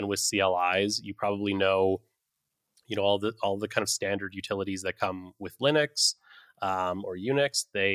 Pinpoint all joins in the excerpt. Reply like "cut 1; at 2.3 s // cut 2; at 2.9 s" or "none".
none

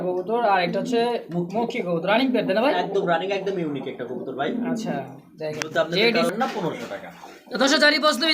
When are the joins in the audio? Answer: cut 1; at 6.3 s

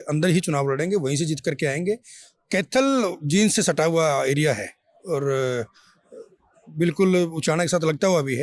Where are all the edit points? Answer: none

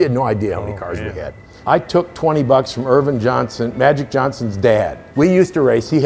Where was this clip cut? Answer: cut 1; at 1.5 s // cut 2; at 5.0 s

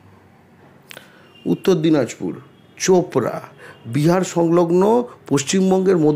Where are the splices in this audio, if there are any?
none

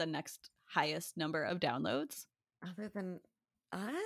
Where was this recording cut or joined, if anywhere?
none

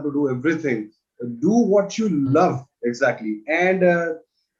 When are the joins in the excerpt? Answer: none

